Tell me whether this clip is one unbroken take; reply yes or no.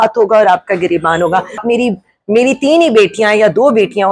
no